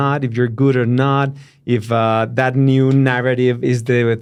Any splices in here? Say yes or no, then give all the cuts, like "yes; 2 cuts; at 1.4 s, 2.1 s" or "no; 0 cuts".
no; 0 cuts